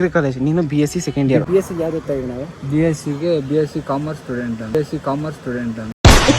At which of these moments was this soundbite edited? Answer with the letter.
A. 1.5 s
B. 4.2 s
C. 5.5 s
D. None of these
A